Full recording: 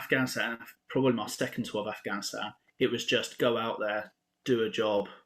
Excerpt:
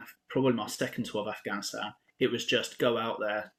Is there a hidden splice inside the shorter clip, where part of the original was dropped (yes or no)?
no